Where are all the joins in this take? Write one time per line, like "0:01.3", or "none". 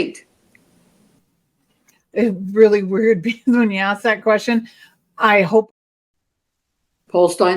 0:05.7